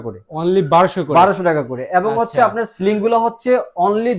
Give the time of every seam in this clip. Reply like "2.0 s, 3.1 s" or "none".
none